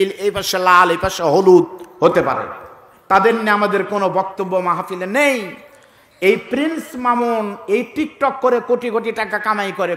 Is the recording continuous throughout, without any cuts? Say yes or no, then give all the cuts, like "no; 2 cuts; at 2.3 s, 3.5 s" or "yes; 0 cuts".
yes; 0 cuts